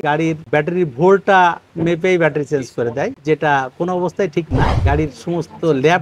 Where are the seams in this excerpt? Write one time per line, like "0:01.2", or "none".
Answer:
none